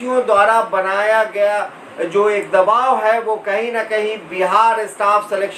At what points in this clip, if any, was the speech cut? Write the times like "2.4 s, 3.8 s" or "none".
none